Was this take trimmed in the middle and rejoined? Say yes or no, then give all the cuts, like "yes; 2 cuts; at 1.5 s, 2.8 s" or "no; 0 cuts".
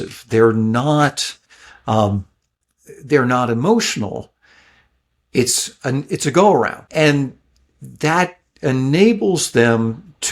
yes; 1 cut; at 6.8 s